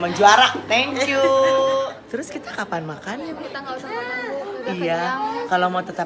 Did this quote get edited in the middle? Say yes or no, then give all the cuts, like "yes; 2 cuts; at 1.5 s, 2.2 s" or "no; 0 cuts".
yes; 1 cut; at 2.0 s